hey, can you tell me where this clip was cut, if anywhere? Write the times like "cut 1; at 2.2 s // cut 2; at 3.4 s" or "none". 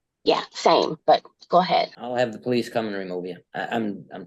cut 1; at 1.0 s // cut 2; at 2.0 s // cut 3; at 3.4 s